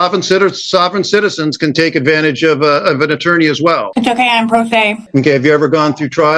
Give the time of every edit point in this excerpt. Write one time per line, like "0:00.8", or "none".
0:05.0